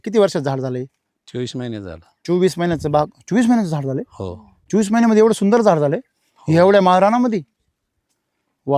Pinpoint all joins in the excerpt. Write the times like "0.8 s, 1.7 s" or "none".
none